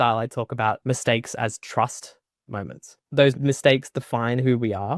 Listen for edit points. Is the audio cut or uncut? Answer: cut